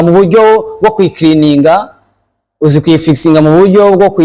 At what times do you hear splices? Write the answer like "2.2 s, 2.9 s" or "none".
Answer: none